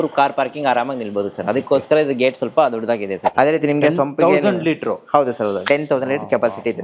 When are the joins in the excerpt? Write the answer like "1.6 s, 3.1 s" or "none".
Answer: 3.2 s